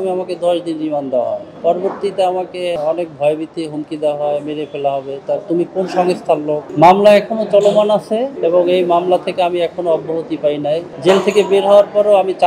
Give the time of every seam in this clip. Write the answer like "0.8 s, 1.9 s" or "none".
1.5 s, 2.8 s, 6.7 s, 8.3 s, 10.9 s